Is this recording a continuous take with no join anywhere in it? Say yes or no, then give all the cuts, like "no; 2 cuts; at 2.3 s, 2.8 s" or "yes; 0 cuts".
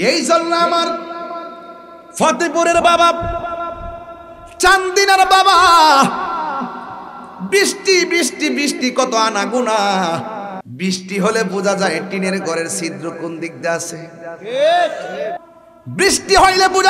no; 2 cuts; at 10.6 s, 15.4 s